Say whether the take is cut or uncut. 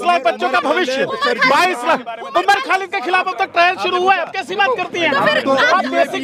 uncut